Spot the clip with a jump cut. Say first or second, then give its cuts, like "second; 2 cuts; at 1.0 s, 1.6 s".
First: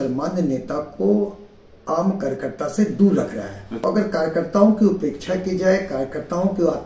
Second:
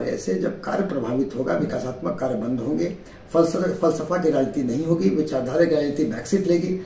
first; 1 cut; at 3.7 s